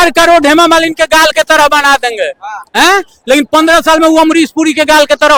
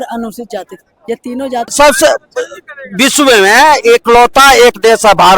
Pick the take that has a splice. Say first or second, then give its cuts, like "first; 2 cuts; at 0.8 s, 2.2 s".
second; 1 cut; at 1.7 s